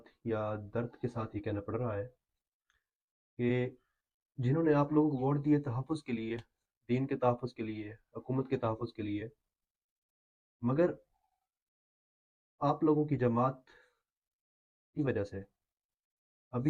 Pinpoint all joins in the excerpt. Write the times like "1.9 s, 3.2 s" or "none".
none